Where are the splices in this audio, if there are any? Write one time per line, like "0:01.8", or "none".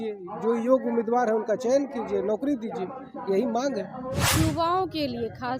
0:04.3